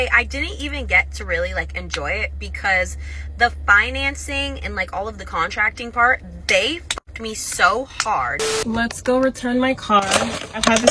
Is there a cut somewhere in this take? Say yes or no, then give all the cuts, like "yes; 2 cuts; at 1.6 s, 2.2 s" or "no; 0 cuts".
yes; 1 cut; at 8.6 s